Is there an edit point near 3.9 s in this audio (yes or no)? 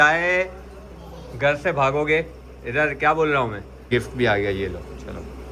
yes